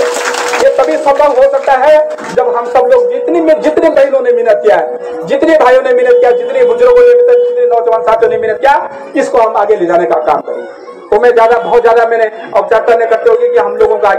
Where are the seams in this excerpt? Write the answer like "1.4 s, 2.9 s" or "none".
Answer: none